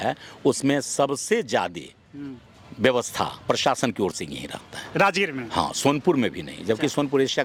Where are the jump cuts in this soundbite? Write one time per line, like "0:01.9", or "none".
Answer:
none